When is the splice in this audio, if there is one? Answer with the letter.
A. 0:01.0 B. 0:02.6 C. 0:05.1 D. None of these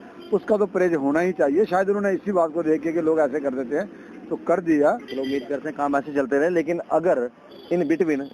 C